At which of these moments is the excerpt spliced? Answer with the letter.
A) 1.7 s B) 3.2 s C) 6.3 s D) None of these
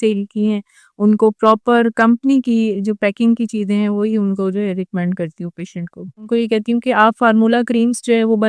C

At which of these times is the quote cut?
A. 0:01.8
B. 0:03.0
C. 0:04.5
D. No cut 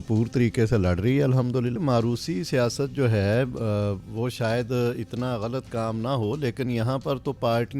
A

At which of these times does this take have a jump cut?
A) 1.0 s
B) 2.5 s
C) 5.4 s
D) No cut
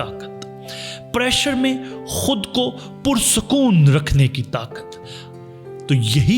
C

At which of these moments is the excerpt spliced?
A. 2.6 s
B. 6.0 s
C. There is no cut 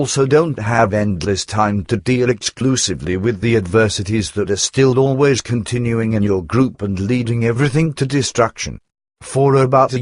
B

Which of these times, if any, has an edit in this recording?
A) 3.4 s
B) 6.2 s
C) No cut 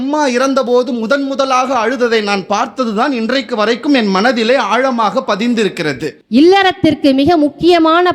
B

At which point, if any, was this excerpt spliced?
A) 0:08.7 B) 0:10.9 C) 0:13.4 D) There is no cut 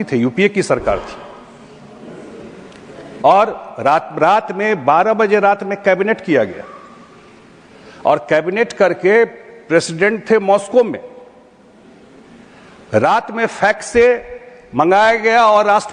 D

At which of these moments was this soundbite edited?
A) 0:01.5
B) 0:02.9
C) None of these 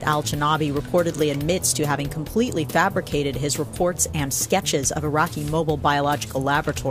B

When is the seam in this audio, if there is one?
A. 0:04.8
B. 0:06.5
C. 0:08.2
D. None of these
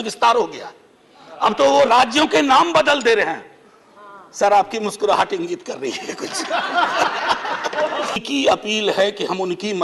C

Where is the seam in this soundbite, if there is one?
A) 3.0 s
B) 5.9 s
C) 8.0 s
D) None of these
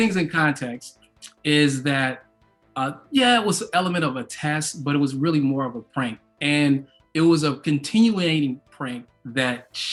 D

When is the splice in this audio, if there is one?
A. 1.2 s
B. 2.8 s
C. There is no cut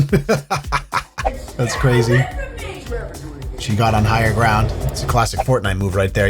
A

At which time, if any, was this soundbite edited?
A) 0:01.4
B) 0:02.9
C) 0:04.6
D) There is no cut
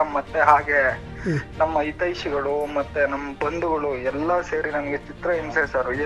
D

